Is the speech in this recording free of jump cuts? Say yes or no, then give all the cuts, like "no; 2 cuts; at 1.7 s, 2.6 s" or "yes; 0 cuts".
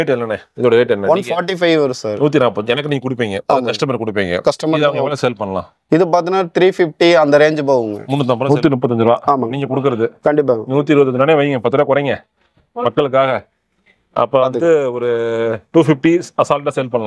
no; 1 cut; at 8.4 s